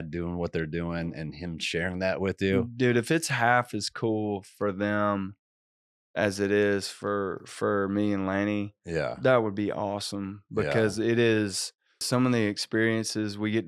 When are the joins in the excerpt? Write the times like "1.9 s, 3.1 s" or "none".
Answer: 12.0 s